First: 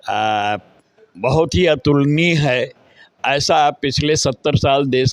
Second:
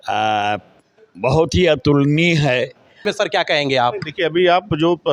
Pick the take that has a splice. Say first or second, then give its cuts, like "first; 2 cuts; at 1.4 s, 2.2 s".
second; 1 cut; at 3.1 s